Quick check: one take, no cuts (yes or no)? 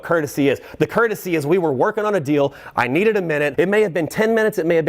no